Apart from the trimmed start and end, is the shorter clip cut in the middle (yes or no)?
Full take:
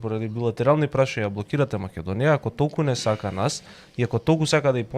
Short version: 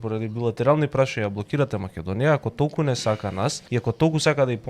yes